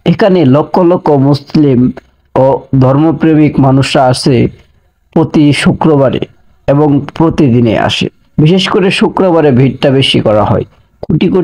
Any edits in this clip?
no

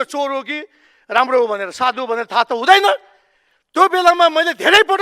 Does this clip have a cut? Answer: no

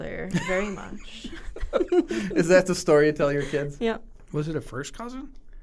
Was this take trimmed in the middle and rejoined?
no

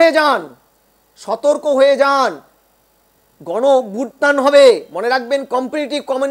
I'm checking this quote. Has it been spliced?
no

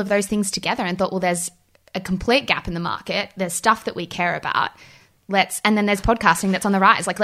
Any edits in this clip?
no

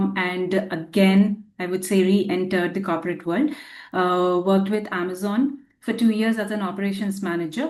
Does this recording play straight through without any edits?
yes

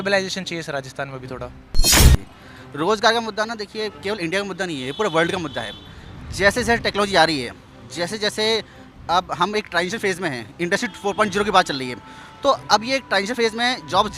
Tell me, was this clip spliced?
yes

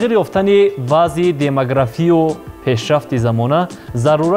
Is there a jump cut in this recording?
no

